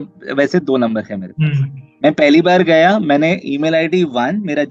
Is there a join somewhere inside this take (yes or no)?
no